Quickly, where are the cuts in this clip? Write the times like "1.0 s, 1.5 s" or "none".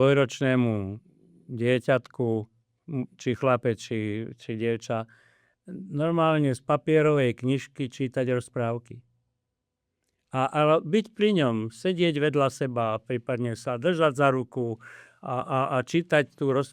none

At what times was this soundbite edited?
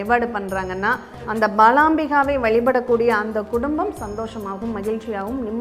none

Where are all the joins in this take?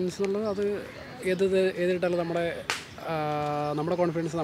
none

